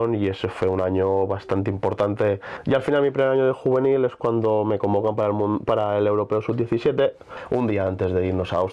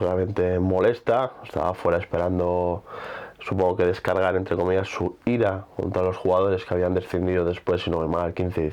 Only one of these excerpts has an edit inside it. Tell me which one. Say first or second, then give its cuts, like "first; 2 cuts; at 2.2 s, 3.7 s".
first; 2 cuts; at 2.5 s, 7.3 s